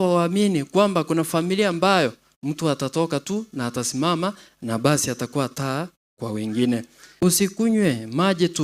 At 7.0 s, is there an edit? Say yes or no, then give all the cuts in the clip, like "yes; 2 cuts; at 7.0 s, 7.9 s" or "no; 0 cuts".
yes; 1 cut; at 7.0 s